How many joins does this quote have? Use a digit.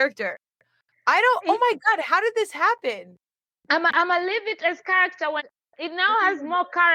1